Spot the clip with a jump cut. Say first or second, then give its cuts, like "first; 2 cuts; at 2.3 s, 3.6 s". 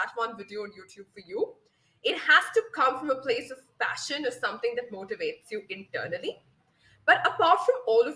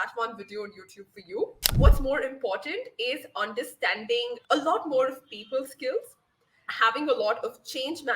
second; 1 cut; at 1.6 s